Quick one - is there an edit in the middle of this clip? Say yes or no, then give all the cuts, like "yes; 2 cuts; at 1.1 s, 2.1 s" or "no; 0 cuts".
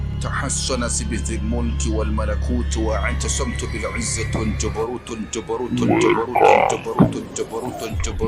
no; 0 cuts